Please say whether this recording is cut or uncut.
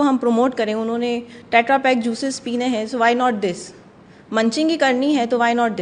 uncut